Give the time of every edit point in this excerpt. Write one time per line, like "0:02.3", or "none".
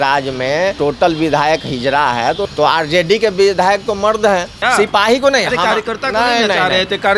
0:00.8
0:02.5
0:04.5